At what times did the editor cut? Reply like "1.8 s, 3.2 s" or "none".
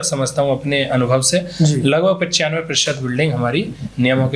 none